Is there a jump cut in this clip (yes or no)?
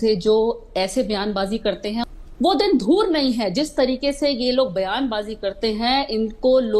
yes